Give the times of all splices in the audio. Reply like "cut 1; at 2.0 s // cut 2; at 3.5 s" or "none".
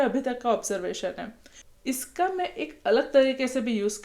cut 1; at 1.7 s